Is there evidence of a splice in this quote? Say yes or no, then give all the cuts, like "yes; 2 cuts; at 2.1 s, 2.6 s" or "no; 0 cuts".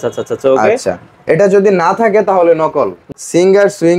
yes; 1 cut; at 3.0 s